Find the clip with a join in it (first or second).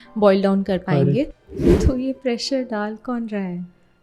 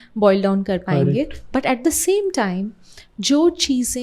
first